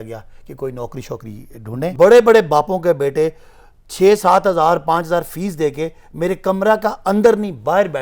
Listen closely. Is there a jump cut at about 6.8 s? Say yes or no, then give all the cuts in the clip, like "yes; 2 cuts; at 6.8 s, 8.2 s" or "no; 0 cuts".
no; 1 cut; at 1.9 s